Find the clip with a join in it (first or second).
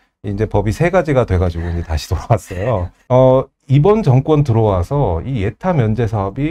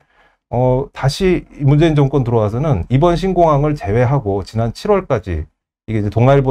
first